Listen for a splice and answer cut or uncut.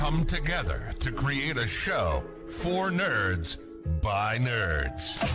uncut